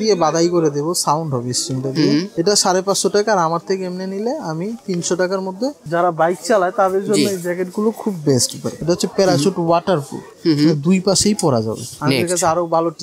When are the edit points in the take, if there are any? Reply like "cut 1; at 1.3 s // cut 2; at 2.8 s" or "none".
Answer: cut 1; at 5.8 s // cut 2; at 8.8 s // cut 3; at 11.9 s